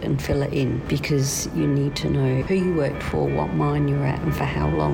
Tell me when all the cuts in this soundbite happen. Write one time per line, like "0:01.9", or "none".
0:00.8
0:02.4